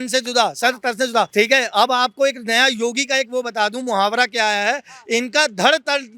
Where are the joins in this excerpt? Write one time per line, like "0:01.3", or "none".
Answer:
0:01.3